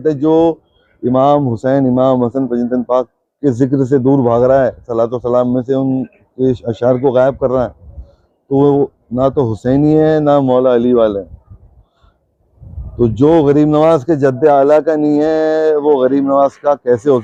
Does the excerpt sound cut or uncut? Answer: uncut